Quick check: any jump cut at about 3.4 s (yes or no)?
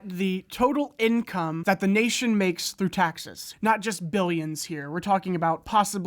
yes